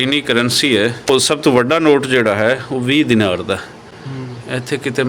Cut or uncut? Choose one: cut